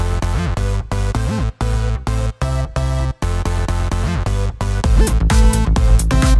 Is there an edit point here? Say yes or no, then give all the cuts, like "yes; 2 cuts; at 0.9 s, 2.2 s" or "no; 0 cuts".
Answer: no; 0 cuts